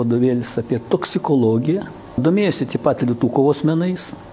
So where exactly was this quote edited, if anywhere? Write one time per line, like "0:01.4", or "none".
0:02.2